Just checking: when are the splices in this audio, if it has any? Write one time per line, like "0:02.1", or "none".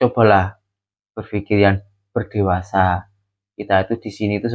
none